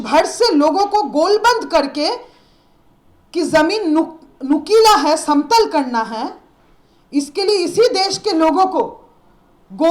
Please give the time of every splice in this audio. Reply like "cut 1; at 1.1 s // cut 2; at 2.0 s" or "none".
none